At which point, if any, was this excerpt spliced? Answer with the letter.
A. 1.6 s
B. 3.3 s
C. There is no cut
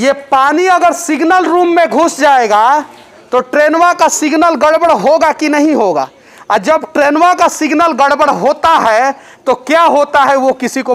C